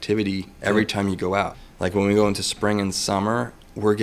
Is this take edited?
yes; 1 cut; at 1.6 s

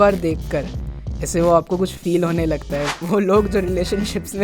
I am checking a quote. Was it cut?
yes; 1 cut; at 2.9 s

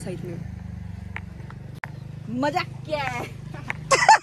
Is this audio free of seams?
yes; 0 cuts

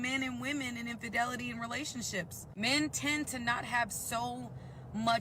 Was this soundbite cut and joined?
yes; 1 cut; at 2.4 s

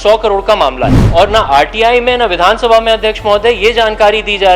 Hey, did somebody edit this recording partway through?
yes; 1 cut; at 0.9 s

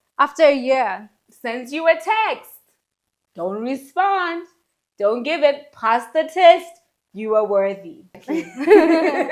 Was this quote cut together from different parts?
yes; 1 cut; at 8.1 s

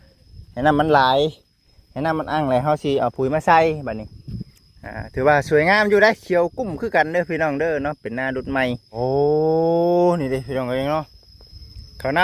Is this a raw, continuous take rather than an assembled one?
no; 1 cut; at 9.0 s

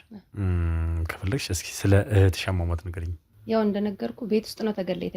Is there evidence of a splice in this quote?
yes; 1 cut; at 3.3 s

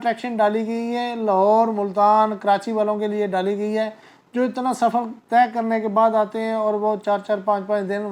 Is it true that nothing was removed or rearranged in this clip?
yes; 0 cuts

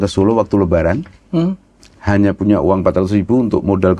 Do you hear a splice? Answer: no; 0 cuts

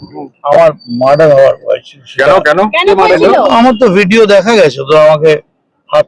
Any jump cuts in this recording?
no; 0 cuts

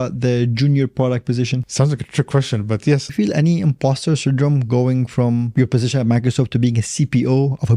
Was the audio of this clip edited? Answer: yes; 3 cuts; at 1.7 s, 3.1 s, 5.5 s

